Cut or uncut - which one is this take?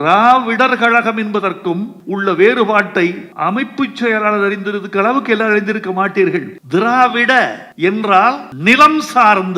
cut